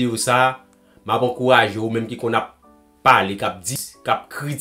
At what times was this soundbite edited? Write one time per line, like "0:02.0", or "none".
0:03.7